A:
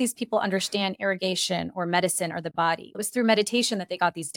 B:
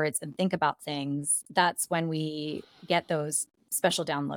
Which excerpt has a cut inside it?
B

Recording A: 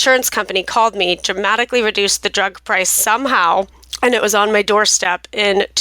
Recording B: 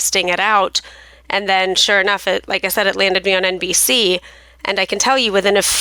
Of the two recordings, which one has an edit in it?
A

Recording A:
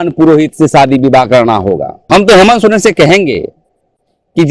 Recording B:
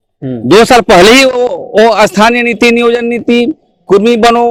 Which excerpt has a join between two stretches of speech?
A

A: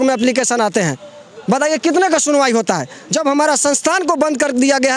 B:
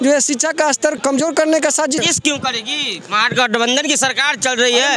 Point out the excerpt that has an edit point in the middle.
B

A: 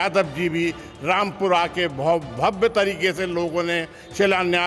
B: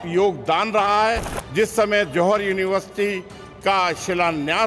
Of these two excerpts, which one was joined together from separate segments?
B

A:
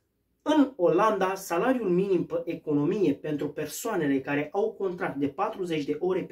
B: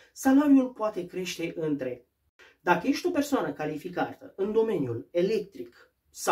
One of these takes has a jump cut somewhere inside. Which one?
B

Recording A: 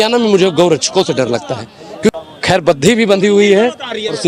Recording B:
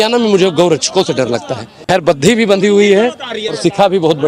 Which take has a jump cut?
B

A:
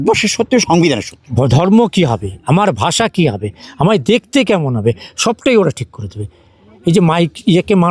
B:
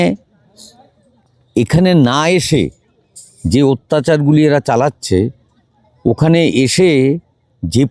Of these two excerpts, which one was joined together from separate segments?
A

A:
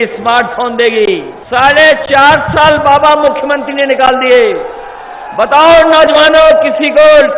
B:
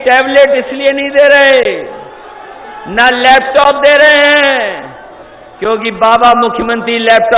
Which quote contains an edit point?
A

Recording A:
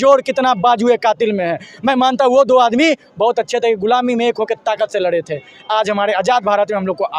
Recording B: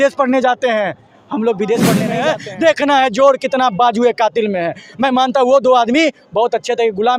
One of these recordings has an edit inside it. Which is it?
B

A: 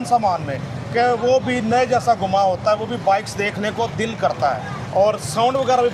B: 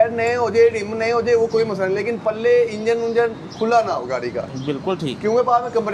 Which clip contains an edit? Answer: A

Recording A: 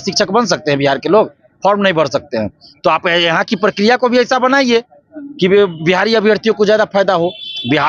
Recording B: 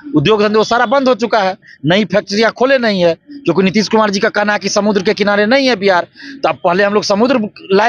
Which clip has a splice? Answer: B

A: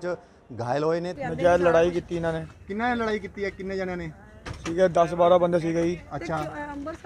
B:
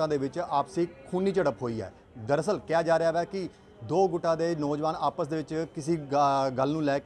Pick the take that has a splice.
A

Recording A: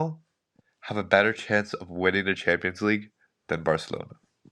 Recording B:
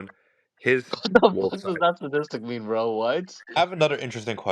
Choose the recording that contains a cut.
B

